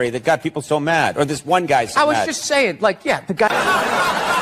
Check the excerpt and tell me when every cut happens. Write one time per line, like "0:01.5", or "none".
0:03.5

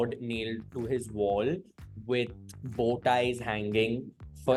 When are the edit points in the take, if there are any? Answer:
none

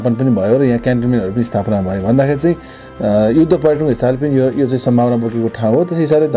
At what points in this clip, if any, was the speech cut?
none

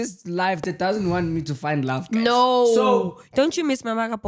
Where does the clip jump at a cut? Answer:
0:03.2

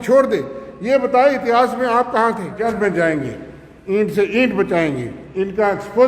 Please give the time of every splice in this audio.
0:02.6

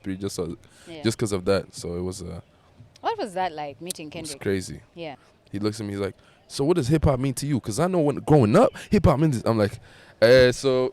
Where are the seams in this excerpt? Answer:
0:05.2

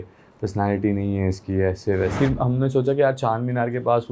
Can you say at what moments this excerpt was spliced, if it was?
0:02.1

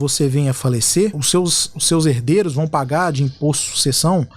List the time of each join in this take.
0:01.2

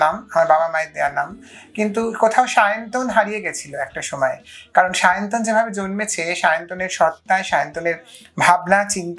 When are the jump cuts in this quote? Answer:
none

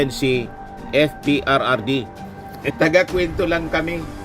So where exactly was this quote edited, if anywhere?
0:02.7

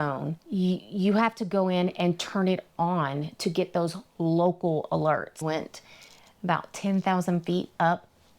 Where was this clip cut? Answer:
0:05.4

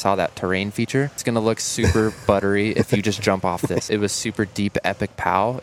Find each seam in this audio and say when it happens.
0:01.2
0:03.8

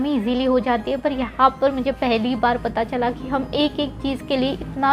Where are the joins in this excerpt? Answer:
none

